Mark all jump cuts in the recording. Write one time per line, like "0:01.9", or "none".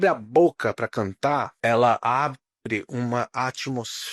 0:01.5